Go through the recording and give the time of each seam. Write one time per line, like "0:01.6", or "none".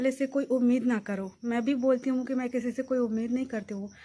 none